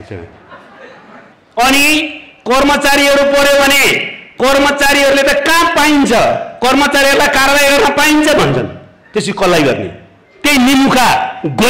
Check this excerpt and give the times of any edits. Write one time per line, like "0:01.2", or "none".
0:01.4